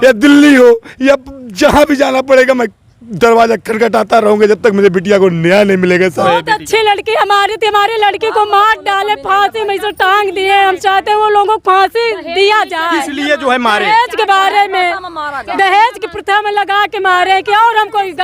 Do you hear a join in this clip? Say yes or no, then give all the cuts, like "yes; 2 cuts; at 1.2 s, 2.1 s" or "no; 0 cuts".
yes; 1 cut; at 6.6 s